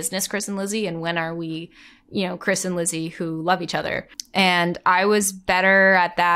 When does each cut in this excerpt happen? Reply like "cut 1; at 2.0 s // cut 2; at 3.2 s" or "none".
none

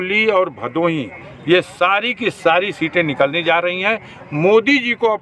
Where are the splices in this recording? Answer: none

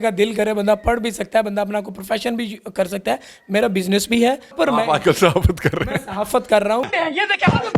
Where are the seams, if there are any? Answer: cut 1; at 1.4 s // cut 2; at 3.2 s // cut 3; at 4.5 s

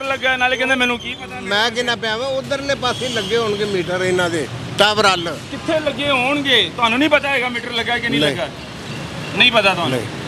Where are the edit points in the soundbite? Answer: none

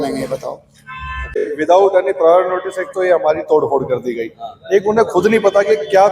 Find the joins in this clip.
cut 1; at 1.5 s

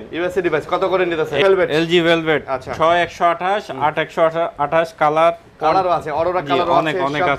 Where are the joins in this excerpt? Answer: cut 1; at 1.4 s

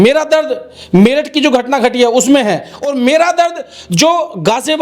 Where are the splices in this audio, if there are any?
none

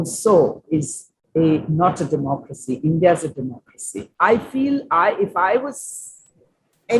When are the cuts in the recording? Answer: cut 1; at 4.0 s

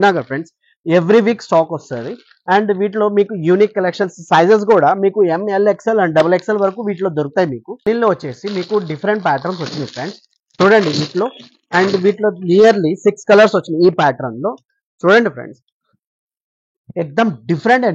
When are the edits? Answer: cut 1; at 7.7 s

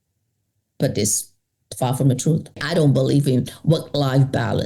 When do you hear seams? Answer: cut 1; at 2.6 s

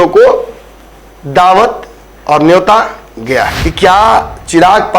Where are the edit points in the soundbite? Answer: cut 1; at 3.6 s

